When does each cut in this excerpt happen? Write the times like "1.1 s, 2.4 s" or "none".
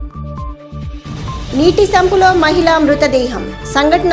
1.1 s